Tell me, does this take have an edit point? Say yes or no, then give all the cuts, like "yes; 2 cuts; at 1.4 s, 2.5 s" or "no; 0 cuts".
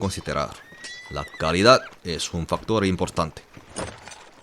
yes; 1 cut; at 3.5 s